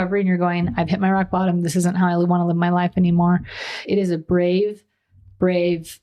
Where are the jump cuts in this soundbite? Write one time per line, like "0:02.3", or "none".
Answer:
0:03.9